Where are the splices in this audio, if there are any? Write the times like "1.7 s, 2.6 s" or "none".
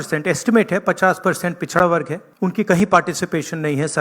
2.2 s